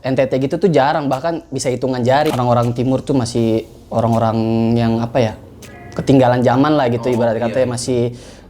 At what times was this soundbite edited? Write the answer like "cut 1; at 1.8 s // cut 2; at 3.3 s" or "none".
cut 1; at 2.3 s